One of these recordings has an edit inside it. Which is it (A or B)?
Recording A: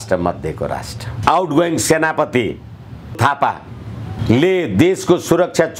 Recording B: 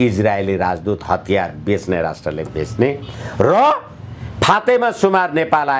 A